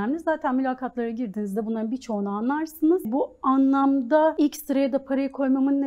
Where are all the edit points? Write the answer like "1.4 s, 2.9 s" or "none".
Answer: 3.1 s, 4.3 s